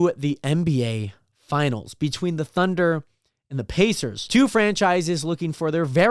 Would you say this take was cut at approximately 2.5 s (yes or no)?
no